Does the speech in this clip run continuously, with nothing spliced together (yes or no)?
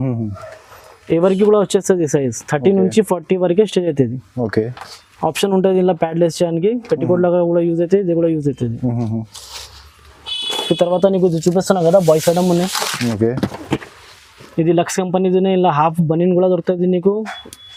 yes